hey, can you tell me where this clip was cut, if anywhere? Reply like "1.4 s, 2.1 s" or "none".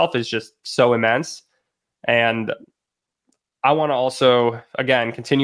none